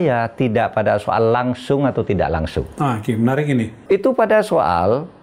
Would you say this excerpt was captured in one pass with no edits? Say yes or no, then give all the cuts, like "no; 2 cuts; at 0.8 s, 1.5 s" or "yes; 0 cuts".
no; 1 cut; at 3.8 s